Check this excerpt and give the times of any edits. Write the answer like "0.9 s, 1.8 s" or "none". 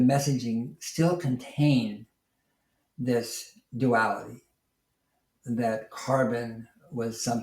none